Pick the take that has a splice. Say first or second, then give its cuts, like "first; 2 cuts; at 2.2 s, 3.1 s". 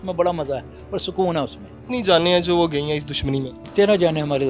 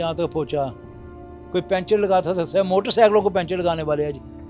first; 2 cuts; at 1.8 s, 3.6 s